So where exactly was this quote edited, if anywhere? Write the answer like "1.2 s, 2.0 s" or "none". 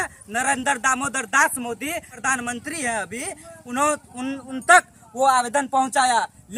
none